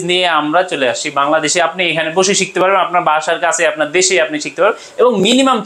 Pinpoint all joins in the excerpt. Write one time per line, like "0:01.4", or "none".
none